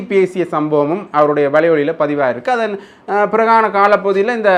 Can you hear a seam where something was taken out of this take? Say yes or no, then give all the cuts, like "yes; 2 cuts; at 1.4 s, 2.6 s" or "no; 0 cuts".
no; 0 cuts